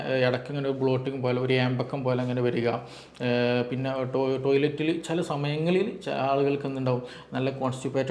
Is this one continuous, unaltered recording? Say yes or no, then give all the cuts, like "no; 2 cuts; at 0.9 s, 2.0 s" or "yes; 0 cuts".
yes; 0 cuts